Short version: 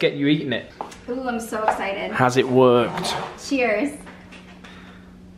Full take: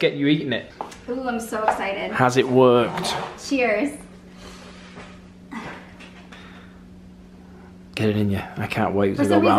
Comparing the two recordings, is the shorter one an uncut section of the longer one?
no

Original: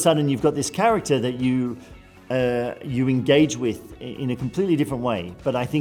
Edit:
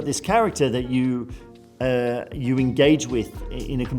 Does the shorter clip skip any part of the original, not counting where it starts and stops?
no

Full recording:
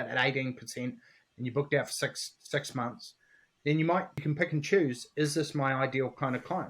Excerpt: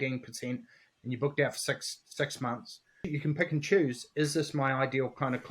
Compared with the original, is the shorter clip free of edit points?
no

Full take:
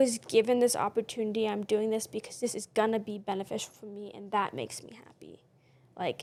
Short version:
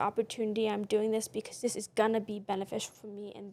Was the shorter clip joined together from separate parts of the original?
no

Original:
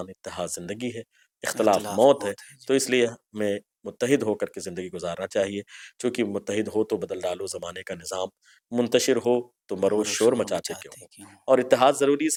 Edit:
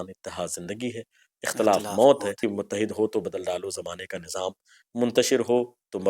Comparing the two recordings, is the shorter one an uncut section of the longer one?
no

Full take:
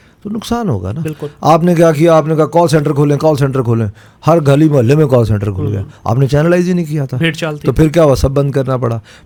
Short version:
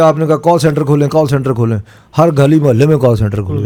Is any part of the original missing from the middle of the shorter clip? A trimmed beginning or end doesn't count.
no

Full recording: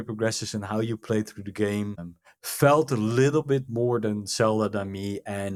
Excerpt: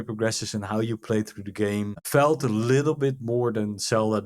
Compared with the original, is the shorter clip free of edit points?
no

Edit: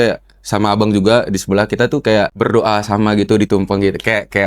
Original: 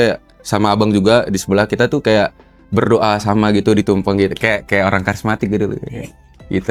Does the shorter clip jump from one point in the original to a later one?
yes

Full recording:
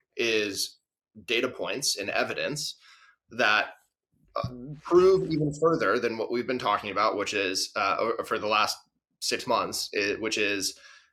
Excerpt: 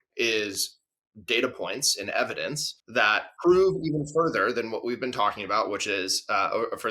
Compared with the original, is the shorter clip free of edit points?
no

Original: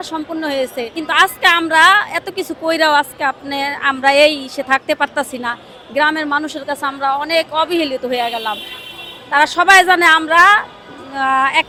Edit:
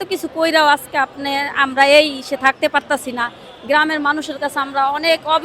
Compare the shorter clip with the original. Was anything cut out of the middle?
no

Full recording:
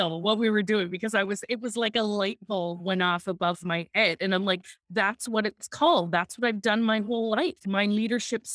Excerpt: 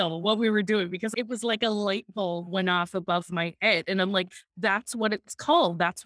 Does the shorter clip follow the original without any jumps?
no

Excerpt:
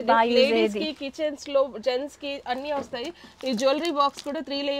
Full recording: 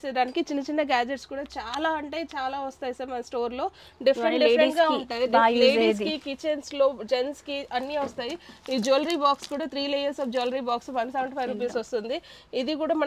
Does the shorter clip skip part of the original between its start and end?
no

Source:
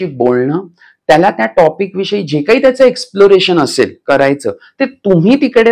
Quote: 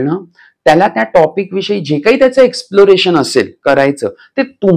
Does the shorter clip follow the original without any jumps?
yes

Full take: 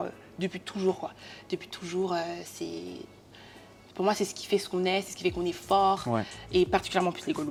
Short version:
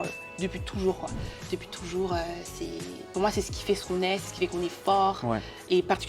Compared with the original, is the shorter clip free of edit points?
no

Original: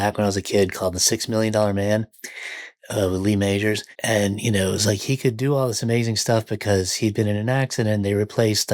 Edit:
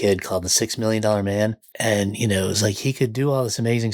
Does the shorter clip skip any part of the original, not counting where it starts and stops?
yes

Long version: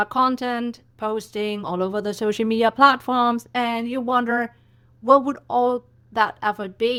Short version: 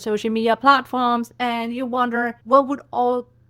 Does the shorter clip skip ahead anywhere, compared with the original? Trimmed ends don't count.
yes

